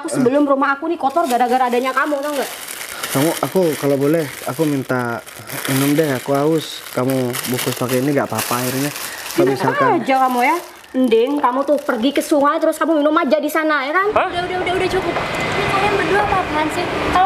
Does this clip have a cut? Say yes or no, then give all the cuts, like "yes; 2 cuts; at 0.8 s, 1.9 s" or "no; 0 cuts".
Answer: yes; 1 cut; at 14.1 s